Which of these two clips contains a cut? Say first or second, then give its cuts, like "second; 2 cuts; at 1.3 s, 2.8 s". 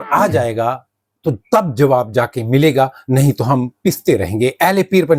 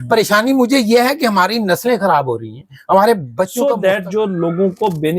second; 1 cut; at 3.5 s